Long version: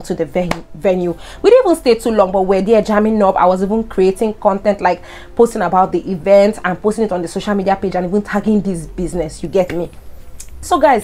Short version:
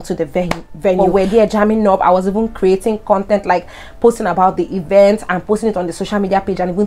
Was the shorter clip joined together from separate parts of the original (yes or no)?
yes